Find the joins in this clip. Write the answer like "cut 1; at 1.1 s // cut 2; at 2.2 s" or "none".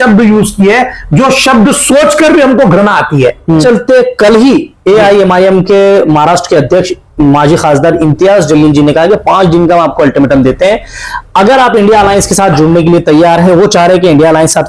cut 1; at 3.6 s